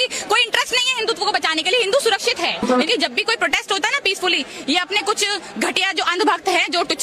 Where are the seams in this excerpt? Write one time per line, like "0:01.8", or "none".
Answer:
0:02.9

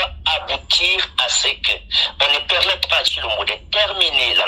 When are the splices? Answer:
none

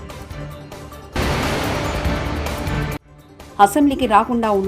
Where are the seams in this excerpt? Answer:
0:01.1
0:03.1

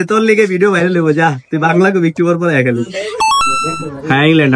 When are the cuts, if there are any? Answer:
0:03.2

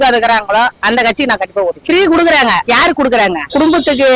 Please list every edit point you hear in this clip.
0:01.8

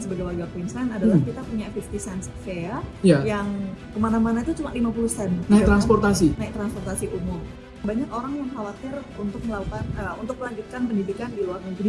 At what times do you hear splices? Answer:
0:05.4
0:07.8

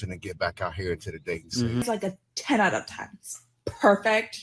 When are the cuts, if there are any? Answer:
0:01.8

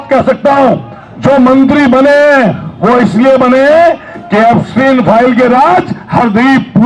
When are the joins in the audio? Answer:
none

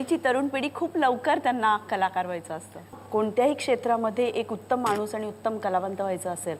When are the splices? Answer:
0:02.9

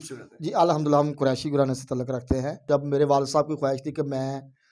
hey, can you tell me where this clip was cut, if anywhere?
0:02.6

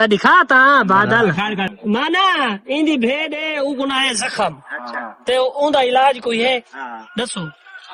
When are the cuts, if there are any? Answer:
0:01.7

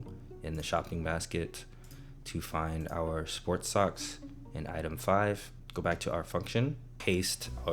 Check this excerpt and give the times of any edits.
0:05.6
0:06.9

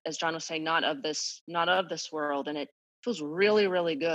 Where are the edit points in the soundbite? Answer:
none

